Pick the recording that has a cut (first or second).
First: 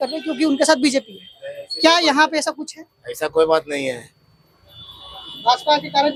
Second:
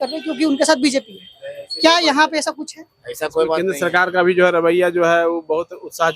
second